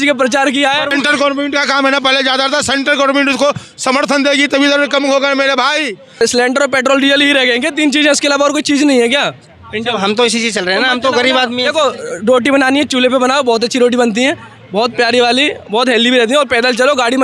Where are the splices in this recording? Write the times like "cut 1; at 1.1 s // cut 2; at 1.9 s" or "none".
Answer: cut 1; at 0.9 s // cut 2; at 6.2 s